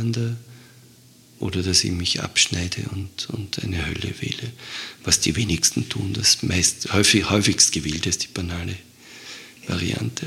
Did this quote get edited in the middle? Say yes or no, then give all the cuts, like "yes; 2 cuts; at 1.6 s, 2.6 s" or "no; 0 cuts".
no; 0 cuts